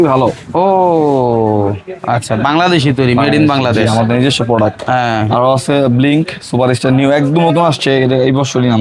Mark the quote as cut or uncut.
uncut